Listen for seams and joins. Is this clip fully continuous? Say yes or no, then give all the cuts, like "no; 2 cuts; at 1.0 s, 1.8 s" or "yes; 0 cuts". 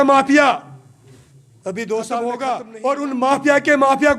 no; 1 cut; at 2.2 s